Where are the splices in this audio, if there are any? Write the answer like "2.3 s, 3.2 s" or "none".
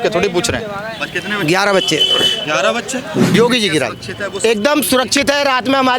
3.3 s